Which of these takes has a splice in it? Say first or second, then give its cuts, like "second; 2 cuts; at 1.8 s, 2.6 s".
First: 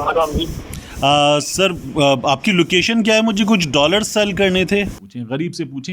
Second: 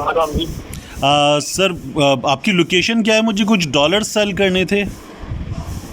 first; 1 cut; at 5.0 s